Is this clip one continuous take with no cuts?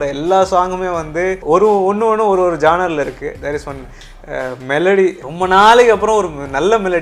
no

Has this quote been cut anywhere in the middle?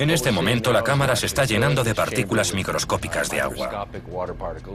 yes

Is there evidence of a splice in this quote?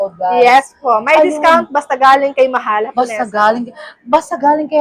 no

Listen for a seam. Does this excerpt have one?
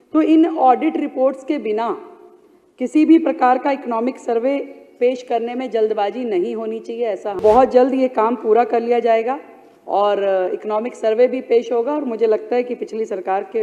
yes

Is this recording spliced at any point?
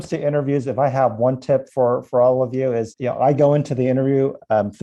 yes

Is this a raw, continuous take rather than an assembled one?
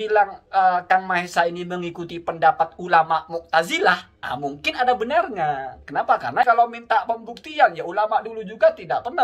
no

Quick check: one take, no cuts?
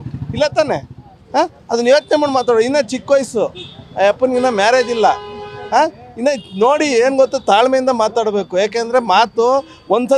yes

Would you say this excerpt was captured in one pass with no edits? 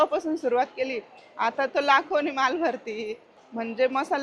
no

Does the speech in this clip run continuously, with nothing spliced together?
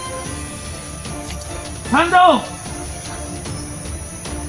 yes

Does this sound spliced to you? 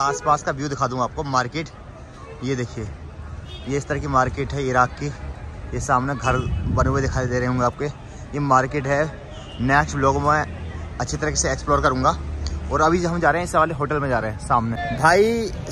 no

